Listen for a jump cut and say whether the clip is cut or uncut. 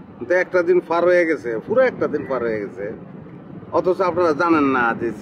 uncut